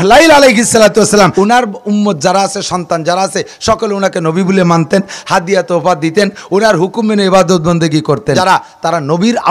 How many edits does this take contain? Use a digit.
2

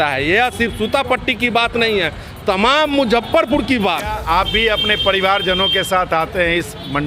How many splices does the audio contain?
1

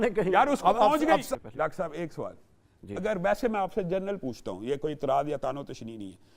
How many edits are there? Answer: 1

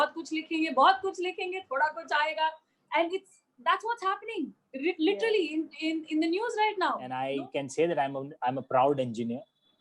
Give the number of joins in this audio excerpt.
1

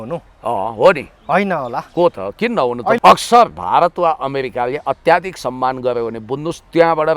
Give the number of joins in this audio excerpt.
1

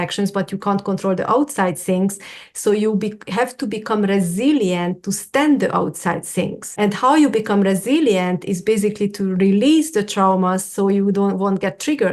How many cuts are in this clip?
1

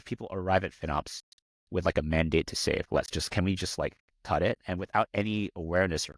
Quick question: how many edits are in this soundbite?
1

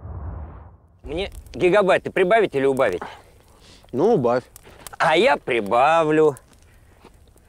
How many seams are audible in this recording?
1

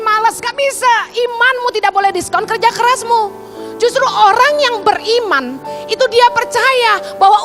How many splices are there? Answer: 0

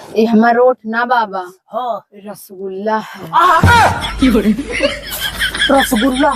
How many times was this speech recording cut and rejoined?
0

